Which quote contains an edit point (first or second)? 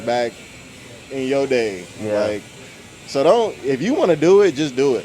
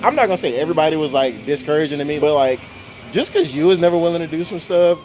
second